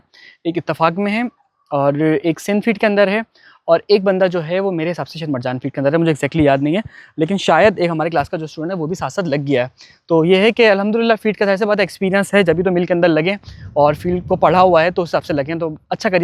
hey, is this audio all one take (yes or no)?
yes